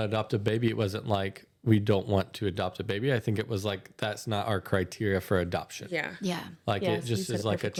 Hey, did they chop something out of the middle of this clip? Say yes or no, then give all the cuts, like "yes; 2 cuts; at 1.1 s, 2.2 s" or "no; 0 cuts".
no; 0 cuts